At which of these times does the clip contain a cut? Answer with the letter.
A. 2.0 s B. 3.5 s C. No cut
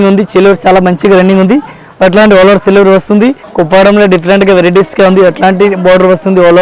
B